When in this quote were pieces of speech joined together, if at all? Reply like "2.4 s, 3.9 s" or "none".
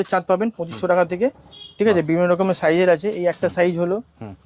none

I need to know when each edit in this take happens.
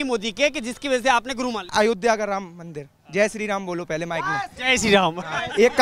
1.7 s

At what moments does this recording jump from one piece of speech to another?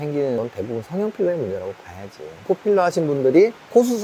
2.3 s

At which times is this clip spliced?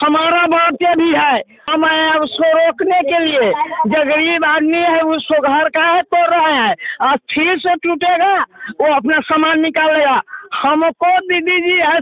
1.7 s

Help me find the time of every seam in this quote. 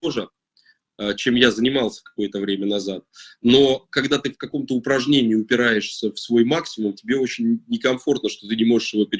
none

